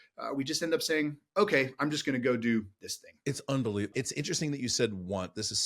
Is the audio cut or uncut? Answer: cut